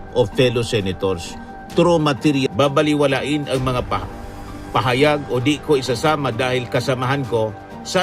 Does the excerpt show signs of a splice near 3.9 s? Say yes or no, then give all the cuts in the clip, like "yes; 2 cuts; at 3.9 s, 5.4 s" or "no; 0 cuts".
no; 1 cut; at 2.5 s